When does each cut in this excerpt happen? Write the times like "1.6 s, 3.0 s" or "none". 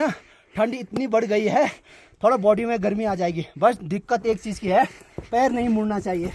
none